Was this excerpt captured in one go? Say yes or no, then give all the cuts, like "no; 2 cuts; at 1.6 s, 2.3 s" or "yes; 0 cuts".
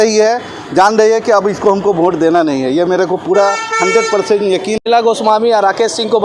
no; 1 cut; at 4.8 s